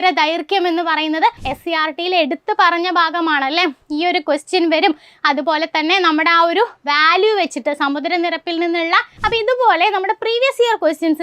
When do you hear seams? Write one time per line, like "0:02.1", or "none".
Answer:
0:01.5
0:09.1